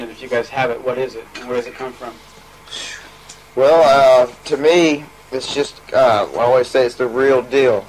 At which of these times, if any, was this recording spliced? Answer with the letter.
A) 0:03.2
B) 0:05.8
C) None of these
A